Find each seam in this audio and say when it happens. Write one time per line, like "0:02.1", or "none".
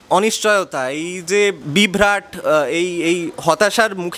0:01.6